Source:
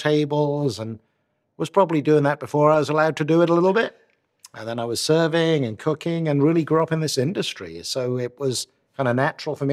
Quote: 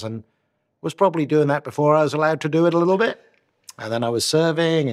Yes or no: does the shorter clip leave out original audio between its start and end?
no